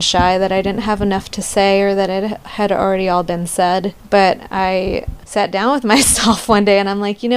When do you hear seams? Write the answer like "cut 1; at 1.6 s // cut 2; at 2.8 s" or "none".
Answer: cut 1; at 4.0 s // cut 2; at 5.1 s